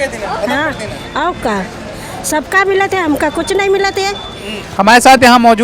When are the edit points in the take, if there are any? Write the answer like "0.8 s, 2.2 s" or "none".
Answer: 4.7 s